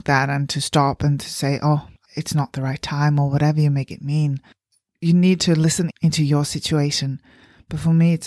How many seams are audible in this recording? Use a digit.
1